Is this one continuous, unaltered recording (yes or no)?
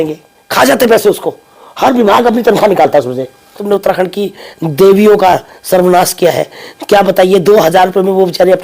no